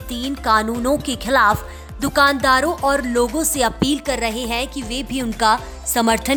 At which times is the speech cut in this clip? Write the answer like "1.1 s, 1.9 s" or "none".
none

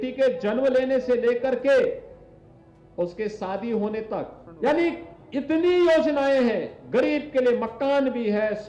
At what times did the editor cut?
4.4 s

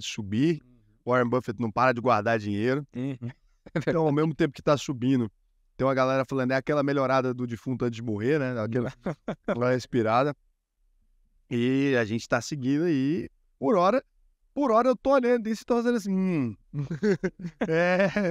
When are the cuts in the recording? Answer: none

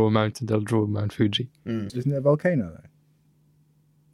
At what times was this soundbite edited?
1.9 s

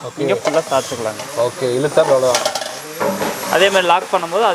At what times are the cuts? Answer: none

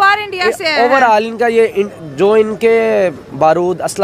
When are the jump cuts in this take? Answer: none

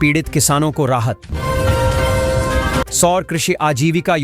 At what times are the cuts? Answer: 1.3 s, 2.9 s

